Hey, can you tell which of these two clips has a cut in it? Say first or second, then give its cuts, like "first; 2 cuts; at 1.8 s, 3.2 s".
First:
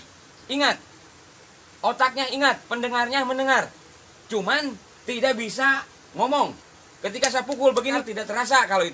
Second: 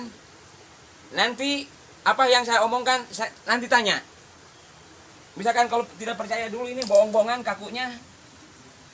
first; 1 cut; at 8.0 s